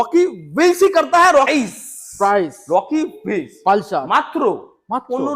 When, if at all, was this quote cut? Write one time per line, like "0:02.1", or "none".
0:01.5